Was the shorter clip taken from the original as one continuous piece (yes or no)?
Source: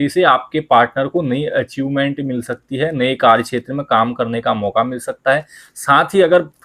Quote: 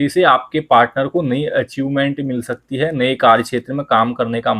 yes